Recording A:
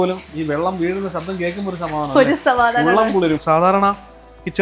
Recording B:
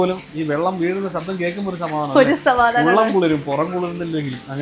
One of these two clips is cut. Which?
A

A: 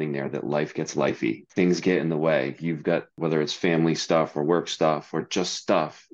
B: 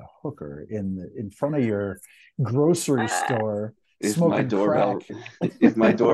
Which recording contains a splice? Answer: A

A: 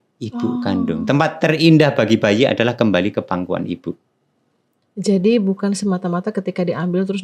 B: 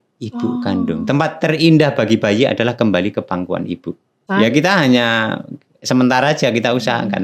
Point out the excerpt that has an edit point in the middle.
B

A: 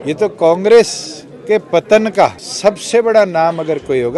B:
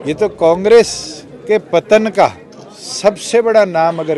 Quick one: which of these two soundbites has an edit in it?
A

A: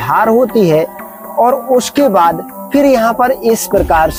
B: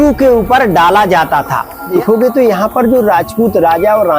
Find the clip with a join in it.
B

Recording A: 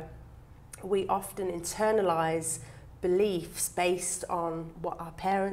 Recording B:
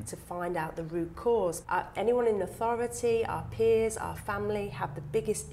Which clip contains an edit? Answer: B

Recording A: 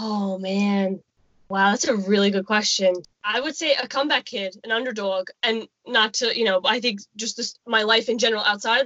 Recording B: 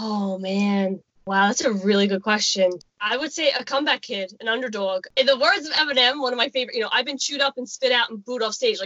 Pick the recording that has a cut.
B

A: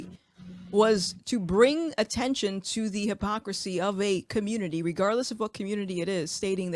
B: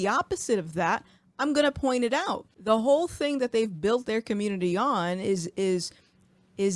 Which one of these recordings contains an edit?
B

